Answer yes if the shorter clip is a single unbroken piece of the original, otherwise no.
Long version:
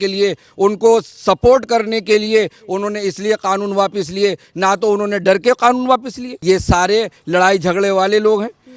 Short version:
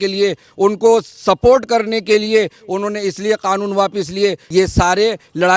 no